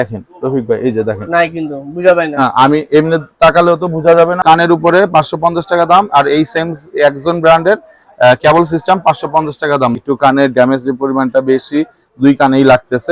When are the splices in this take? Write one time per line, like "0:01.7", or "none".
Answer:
0:04.4
0:10.0